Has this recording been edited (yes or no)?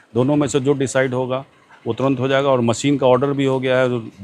no